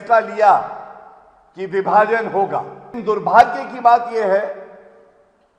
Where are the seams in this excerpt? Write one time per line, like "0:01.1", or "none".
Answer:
0:02.8